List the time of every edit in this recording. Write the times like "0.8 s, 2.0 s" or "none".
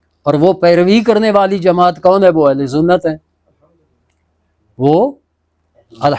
none